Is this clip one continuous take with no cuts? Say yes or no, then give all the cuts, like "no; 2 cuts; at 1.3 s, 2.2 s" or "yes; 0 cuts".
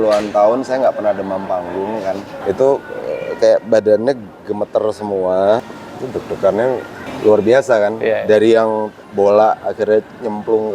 no; 4 cuts; at 2.4 s, 5.7 s, 7.0 s, 9.0 s